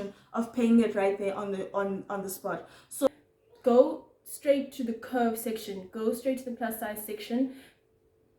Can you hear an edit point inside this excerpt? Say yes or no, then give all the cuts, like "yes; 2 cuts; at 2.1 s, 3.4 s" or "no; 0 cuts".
yes; 1 cut; at 3.1 s